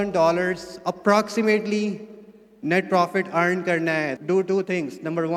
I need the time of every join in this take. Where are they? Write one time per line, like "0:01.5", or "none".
0:04.1